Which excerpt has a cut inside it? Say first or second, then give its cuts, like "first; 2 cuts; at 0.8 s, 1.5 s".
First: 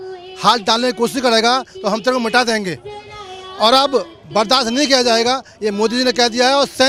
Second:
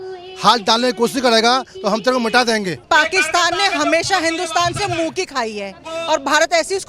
second; 2 cuts; at 2.8 s, 5.9 s